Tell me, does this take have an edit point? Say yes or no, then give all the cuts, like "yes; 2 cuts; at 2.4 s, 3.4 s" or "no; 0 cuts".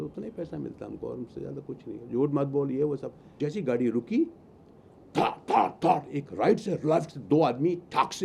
yes; 1 cut; at 3.3 s